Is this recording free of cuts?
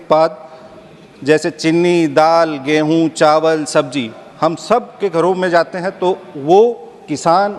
yes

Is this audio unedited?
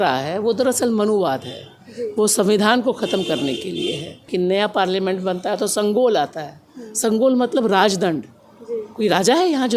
no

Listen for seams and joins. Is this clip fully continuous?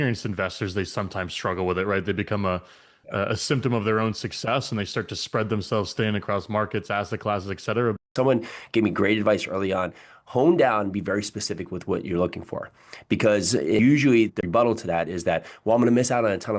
no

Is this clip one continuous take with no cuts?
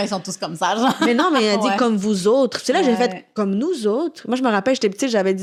yes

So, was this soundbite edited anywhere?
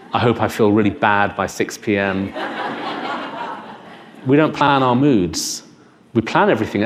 no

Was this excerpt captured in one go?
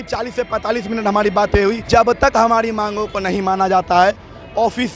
no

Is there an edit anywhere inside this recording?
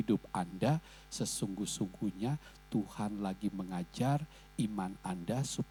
no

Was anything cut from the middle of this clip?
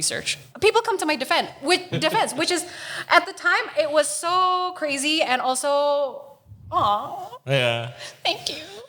no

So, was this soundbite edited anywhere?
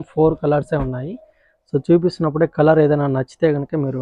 no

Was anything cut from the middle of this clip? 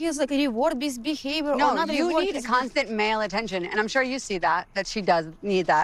no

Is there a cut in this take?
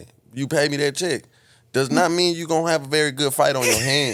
no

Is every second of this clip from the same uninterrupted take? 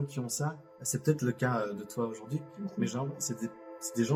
yes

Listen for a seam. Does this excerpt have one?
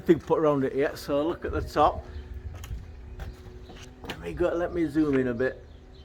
no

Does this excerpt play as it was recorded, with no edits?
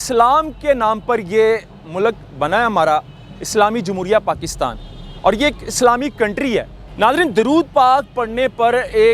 no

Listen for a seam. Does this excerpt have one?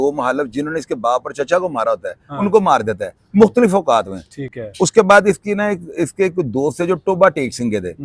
no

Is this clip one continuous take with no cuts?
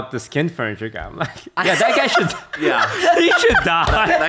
yes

